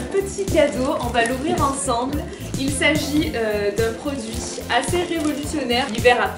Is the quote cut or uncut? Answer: uncut